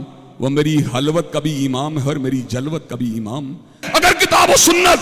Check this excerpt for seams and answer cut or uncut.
cut